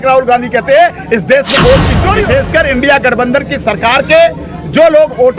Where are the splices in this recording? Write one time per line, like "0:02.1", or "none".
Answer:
0:02.2